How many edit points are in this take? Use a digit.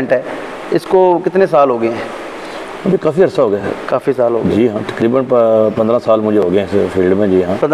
0